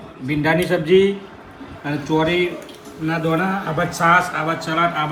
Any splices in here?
no; 0 cuts

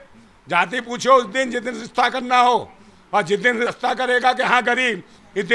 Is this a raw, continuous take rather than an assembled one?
yes; 0 cuts

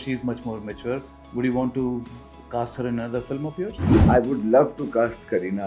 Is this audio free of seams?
no; 1 cut; at 3.9 s

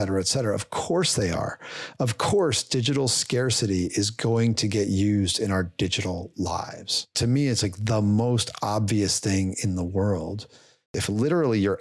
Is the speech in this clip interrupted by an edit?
yes; 2 cuts; at 7.1 s, 10.8 s

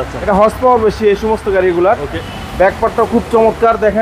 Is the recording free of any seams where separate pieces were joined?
no; 1 cut; at 2.2 s

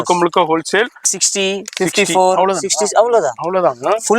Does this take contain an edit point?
yes; 1 cut; at 1.2 s

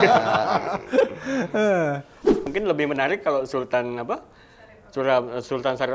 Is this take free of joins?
no; 1 cut; at 2.4 s

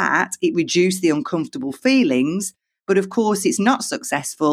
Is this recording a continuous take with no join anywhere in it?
yes; 0 cuts

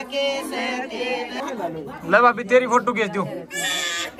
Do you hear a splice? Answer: yes; 1 cut; at 1.4 s

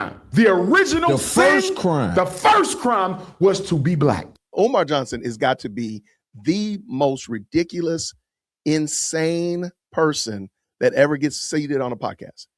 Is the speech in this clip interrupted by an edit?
yes; 1 cut; at 4.3 s

